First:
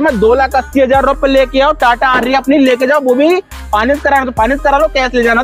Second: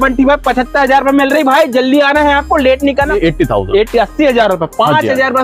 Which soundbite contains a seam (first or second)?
second